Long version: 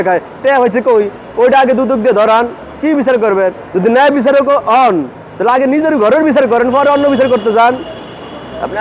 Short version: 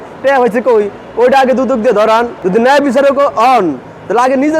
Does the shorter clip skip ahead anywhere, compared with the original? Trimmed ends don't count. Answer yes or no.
yes